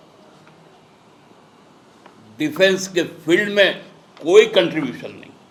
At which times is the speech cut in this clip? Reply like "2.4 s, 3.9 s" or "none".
none